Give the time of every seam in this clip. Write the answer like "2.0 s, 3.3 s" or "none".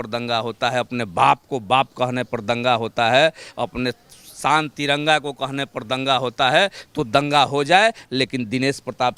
none